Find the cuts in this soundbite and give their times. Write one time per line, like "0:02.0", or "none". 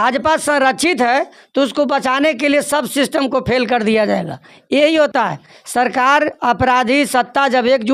none